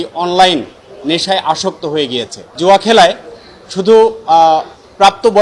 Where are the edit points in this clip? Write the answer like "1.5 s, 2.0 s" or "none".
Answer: 2.5 s